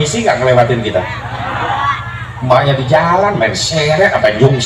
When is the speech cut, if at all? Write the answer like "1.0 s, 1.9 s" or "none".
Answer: none